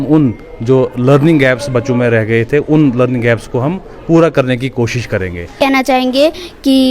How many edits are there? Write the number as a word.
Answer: one